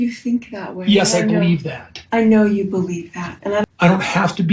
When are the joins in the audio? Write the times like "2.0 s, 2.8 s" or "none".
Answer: 3.6 s